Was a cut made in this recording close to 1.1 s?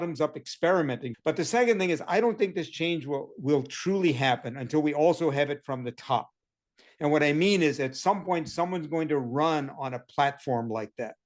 yes; 1 cut; at 1.1 s

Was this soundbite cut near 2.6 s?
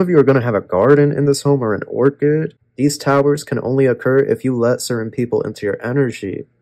yes; 1 cut; at 2.6 s

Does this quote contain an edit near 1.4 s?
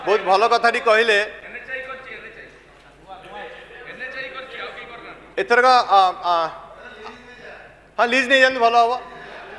no; 0 cuts

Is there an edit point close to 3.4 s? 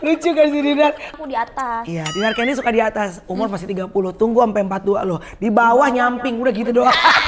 no; 1 cut; at 1.1 s

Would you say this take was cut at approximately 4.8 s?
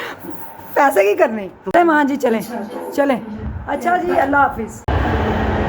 yes; 2 cuts; at 1.5 s, 4.8 s

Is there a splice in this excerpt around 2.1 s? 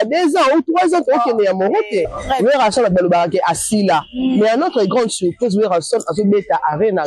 yes; 1 cut; at 2.1 s

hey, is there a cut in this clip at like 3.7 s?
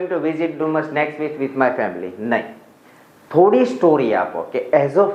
no; 0 cuts

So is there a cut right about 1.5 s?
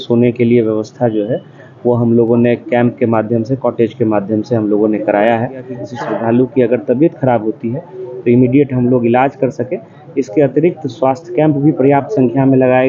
no; 1 cut; at 5.8 s

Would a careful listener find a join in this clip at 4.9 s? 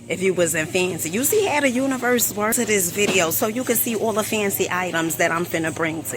no; 1 cut; at 2.5 s

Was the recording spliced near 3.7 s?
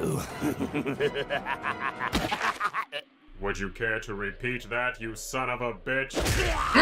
yes; 1 cut; at 3.7 s

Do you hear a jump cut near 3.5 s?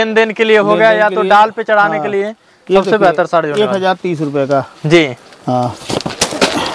no; 0 cuts

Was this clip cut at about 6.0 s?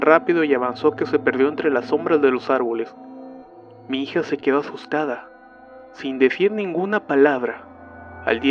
no; 1 cut; at 4.4 s

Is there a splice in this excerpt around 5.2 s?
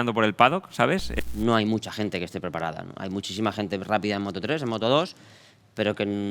no; 1 cut; at 1.1 s

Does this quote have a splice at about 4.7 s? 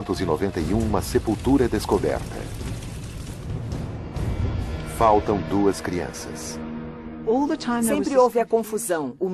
yes; 1 cut; at 4.7 s

